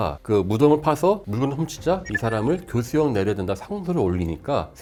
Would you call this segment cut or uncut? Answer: uncut